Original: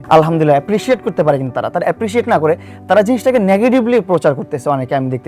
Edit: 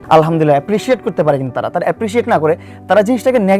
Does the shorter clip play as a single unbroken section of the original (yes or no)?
yes